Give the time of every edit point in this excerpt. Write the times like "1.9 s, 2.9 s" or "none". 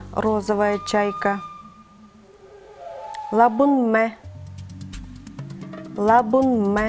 4.3 s, 6.0 s